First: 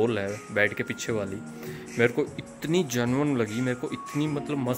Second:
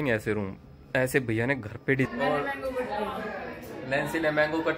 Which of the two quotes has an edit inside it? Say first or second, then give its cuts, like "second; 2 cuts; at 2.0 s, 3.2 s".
second; 1 cut; at 2.1 s